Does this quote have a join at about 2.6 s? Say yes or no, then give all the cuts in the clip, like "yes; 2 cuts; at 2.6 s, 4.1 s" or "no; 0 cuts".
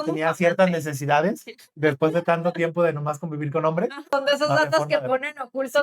no; 1 cut; at 4.1 s